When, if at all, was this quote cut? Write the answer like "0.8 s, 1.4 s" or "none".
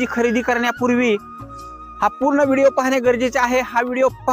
none